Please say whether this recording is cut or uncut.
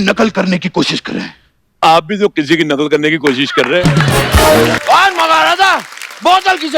cut